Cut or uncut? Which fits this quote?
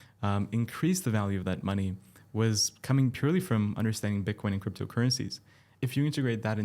cut